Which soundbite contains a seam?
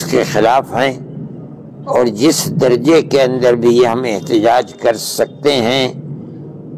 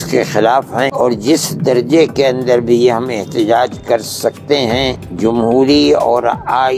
second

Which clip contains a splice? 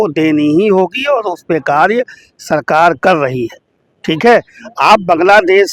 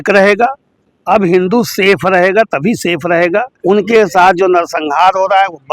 second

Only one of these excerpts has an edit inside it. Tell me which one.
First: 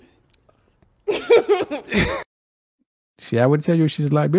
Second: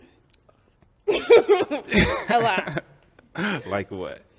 second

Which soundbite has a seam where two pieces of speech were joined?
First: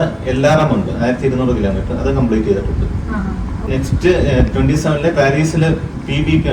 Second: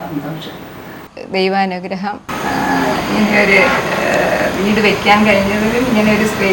second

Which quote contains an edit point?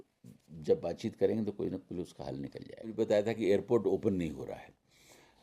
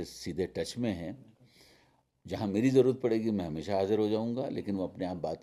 first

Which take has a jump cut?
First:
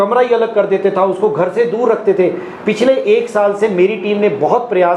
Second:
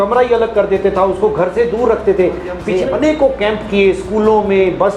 second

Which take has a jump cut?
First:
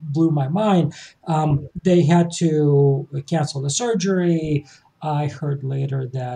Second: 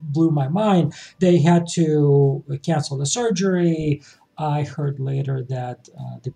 second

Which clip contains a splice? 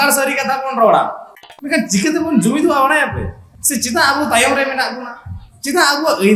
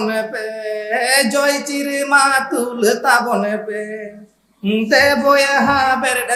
first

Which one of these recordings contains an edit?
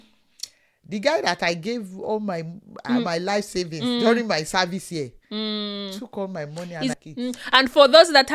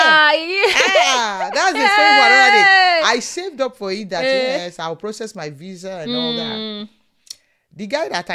first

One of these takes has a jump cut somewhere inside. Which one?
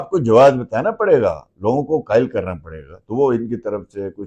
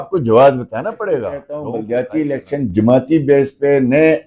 second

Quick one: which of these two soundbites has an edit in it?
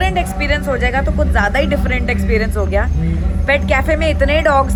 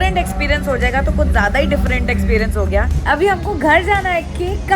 second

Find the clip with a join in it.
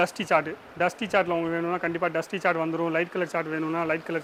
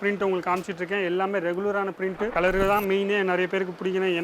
second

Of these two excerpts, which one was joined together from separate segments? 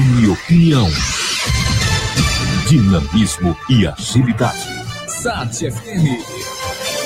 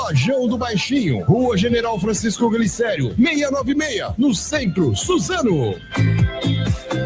second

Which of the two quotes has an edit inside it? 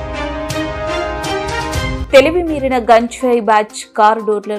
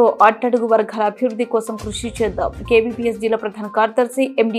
first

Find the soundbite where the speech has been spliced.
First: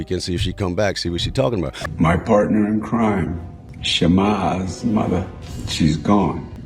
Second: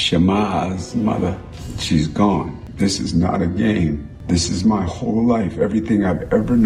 first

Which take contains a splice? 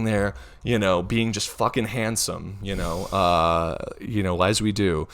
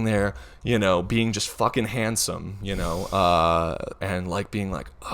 second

